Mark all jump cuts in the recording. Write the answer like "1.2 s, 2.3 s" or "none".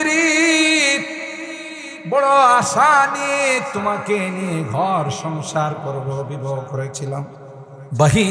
7.4 s